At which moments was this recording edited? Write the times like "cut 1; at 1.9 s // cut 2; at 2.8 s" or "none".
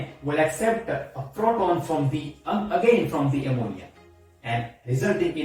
none